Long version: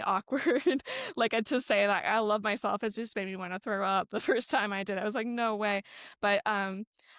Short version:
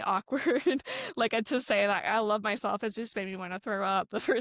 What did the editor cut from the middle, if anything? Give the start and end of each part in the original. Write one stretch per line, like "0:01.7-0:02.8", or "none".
none